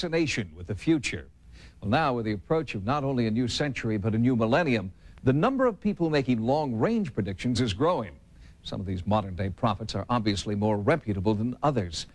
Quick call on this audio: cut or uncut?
cut